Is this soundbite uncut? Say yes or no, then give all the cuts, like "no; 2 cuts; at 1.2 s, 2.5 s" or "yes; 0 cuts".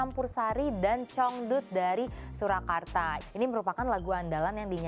no; 1 cut; at 3.2 s